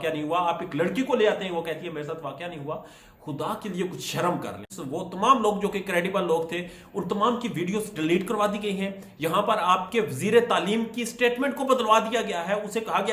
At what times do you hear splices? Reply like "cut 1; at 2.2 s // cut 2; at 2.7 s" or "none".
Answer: cut 1; at 4.7 s